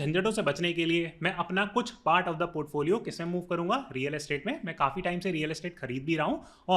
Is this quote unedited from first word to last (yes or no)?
yes